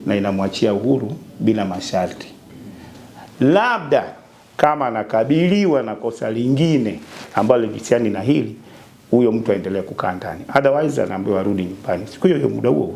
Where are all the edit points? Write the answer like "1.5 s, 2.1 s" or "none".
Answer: none